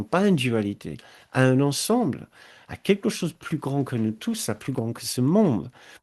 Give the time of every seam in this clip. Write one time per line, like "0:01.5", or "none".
none